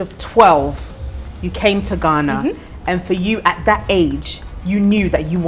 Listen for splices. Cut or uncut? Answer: uncut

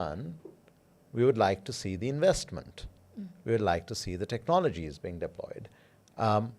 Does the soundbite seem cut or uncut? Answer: uncut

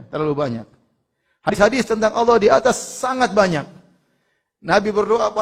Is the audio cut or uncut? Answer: cut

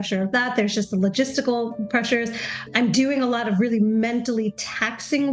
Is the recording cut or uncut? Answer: cut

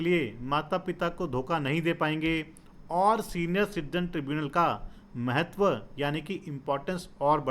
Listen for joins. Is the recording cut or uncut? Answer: uncut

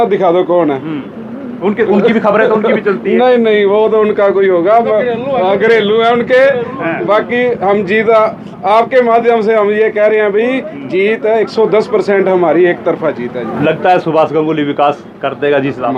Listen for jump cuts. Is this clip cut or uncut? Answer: uncut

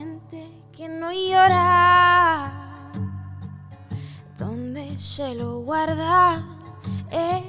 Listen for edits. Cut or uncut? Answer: uncut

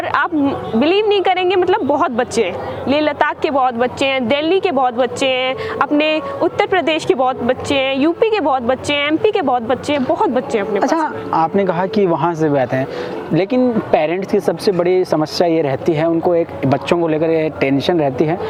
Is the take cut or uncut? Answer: uncut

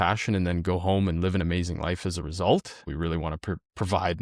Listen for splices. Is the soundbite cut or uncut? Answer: cut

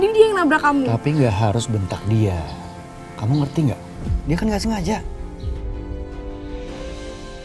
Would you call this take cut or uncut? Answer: uncut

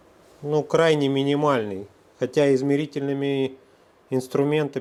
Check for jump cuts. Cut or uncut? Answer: uncut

